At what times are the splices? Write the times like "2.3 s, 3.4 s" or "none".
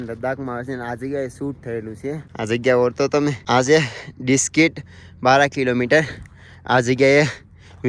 2.3 s, 3.4 s